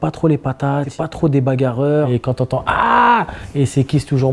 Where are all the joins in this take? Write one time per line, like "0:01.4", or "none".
0:00.9
0:02.2